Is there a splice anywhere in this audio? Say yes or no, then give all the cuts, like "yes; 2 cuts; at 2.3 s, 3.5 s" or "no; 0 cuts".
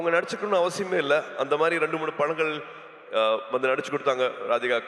no; 0 cuts